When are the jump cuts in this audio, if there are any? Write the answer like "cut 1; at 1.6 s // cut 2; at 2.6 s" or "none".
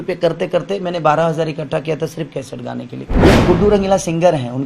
cut 1; at 3.0 s